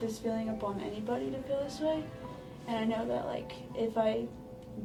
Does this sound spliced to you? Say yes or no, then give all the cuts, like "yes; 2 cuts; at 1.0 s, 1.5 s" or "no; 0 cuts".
no; 0 cuts